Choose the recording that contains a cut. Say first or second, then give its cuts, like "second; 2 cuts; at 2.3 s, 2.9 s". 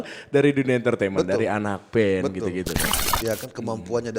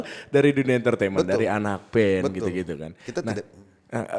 first; 1 cut; at 3.0 s